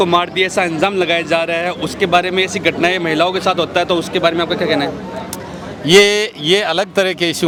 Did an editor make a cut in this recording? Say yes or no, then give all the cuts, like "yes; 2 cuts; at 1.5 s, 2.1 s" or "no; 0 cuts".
no; 0 cuts